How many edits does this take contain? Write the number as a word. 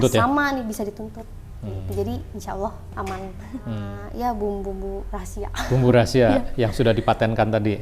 one